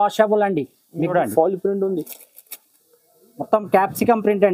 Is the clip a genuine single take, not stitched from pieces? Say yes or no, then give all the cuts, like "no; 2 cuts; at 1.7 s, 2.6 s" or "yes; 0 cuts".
no; 1 cut; at 1.0 s